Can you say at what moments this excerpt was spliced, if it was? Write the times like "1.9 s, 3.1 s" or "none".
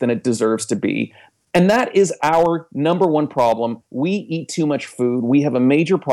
3.8 s